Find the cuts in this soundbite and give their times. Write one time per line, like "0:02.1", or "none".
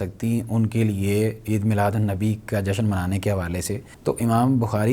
0:03.9